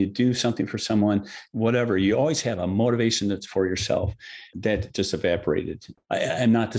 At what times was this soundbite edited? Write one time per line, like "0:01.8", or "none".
0:01.4
0:04.5